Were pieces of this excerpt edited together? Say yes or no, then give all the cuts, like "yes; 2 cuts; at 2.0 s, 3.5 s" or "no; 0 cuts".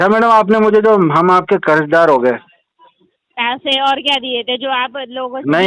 no; 0 cuts